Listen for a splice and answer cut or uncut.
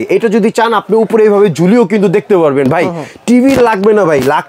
uncut